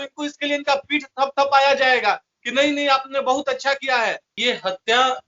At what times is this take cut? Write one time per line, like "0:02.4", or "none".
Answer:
0:04.3